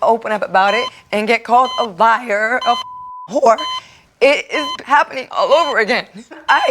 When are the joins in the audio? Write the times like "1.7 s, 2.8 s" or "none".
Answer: 1.0 s, 4.8 s